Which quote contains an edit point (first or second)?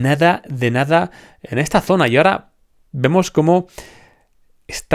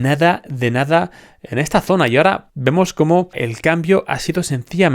second